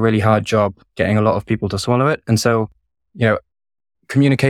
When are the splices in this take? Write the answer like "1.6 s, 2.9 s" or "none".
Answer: none